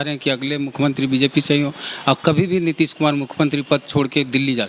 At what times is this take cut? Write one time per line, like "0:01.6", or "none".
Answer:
none